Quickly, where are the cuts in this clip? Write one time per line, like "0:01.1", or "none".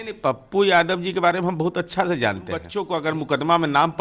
0:02.7